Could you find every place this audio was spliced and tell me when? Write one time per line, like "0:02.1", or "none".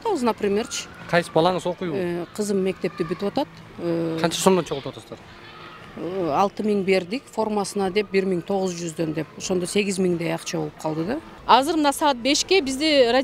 0:11.3